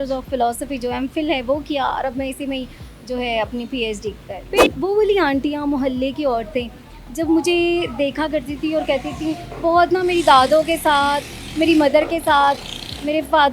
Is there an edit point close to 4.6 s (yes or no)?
yes